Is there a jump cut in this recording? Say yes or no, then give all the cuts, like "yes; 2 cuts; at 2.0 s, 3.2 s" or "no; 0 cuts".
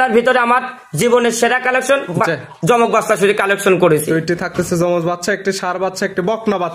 no; 0 cuts